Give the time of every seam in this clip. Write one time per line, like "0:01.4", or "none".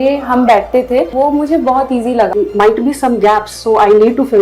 0:01.1
0:02.3